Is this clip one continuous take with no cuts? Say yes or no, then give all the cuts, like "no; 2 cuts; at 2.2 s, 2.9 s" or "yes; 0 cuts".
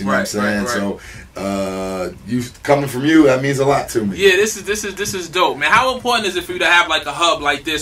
yes; 0 cuts